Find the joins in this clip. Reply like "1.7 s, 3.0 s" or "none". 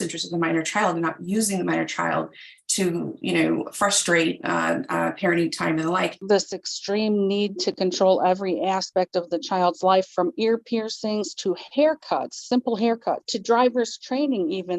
6.2 s, 13.3 s